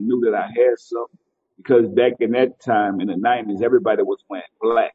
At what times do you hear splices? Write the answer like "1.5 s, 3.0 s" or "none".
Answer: none